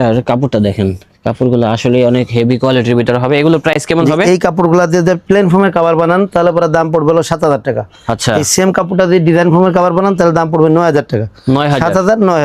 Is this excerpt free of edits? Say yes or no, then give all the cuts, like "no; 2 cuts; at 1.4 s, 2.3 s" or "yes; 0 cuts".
yes; 0 cuts